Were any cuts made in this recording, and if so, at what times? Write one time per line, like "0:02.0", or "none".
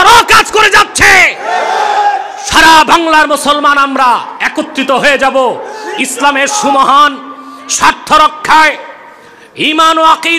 none